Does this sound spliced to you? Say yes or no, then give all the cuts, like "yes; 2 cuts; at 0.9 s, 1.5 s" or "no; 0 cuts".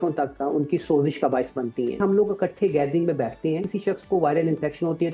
yes; 2 cuts; at 2.0 s, 3.7 s